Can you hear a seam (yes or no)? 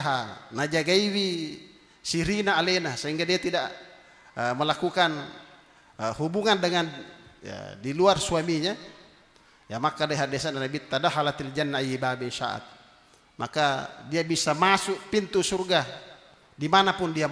no